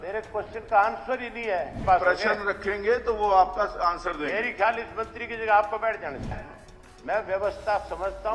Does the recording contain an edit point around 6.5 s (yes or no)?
yes